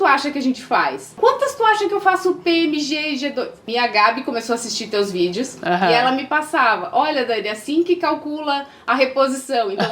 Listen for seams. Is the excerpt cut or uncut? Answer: cut